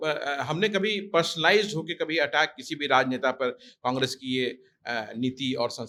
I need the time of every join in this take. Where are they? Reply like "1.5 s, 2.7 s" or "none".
none